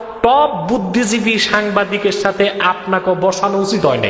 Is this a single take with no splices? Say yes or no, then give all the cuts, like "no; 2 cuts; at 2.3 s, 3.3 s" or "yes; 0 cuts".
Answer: yes; 0 cuts